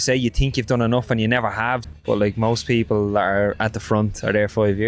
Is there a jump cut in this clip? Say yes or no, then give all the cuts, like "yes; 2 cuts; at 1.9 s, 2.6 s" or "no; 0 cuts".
yes; 1 cut; at 1.8 s